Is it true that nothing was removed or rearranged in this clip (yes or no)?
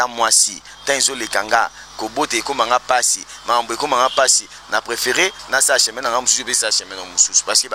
yes